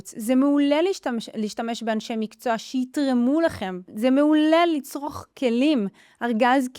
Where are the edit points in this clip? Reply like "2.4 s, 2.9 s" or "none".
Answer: 3.8 s